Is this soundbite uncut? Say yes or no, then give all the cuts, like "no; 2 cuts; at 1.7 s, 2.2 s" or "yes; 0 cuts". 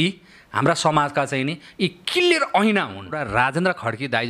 no; 1 cut; at 3.2 s